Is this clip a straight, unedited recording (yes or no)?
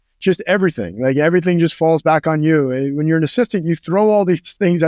yes